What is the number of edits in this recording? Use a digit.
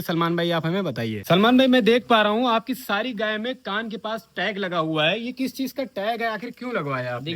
1